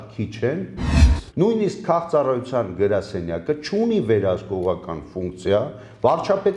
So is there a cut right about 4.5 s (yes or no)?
no